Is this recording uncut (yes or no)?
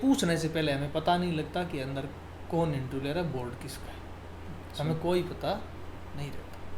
yes